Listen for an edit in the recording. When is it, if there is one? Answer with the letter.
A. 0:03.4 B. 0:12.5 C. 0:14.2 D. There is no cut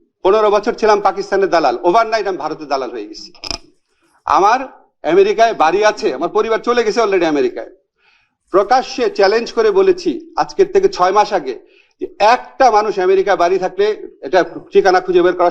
D